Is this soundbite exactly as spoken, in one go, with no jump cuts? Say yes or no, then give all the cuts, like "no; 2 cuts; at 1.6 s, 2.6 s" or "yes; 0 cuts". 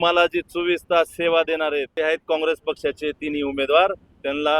no; 1 cut; at 1.9 s